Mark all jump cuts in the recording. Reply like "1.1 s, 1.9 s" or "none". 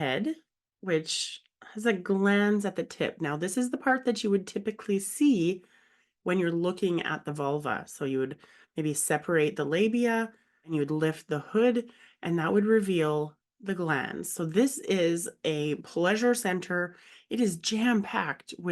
10.7 s